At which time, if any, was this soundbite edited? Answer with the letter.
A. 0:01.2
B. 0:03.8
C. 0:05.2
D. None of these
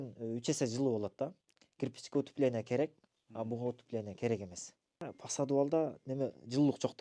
C